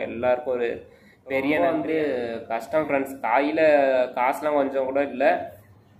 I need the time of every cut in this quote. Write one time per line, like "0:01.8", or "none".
0:01.6